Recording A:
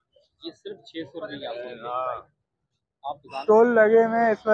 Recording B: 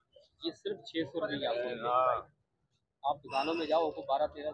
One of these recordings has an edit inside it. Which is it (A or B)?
A